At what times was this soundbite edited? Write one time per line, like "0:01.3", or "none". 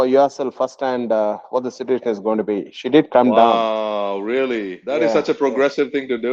0:04.8

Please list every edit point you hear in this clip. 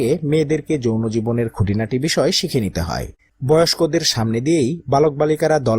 0:03.3

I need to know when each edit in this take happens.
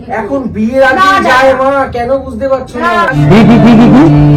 none

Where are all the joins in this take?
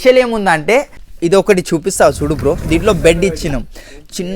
0:01.0

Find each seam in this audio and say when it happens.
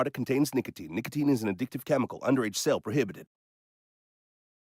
0:01.4

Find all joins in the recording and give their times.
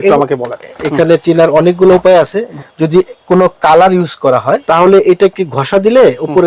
0:00.8
0:02.5
0:04.6

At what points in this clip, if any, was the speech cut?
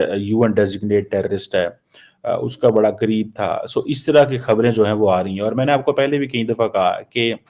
none

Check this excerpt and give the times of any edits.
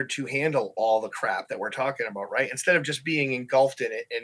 none

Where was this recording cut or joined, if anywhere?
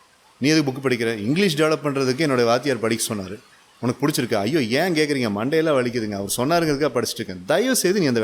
none

